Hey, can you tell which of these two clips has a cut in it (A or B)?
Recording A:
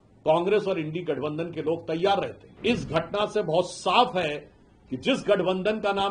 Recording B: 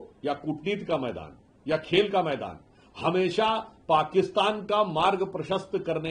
A